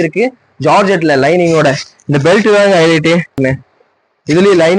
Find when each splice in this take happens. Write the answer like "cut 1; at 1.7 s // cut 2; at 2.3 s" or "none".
cut 1; at 3.4 s

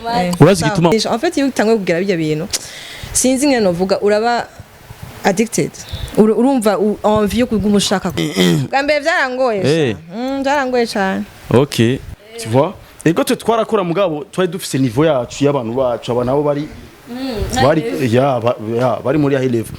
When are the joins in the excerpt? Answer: cut 1; at 0.9 s // cut 2; at 8.2 s // cut 3; at 12.0 s

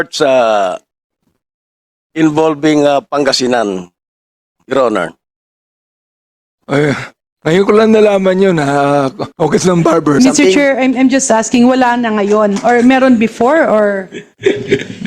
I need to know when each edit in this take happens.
cut 1; at 10.2 s

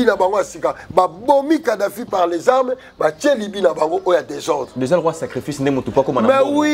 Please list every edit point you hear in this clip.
none

